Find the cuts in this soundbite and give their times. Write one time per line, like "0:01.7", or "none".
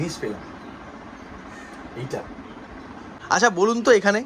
0:03.1